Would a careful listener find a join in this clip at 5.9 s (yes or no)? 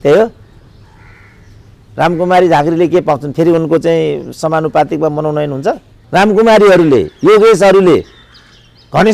yes